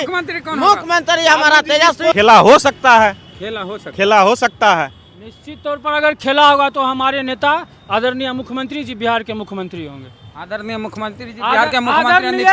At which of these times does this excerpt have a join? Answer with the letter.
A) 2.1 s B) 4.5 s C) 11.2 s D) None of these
A